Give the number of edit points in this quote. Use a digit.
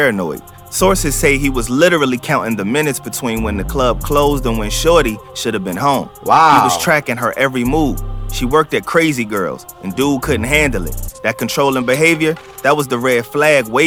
0